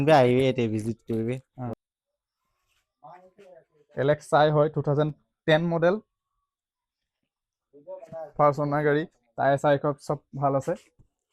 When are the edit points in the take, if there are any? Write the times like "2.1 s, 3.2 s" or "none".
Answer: 1.7 s